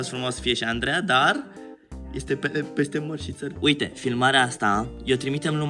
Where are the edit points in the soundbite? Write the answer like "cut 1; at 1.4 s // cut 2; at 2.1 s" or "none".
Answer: cut 1; at 3.4 s